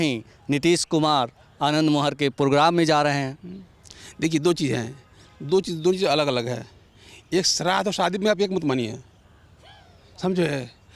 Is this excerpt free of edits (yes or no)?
yes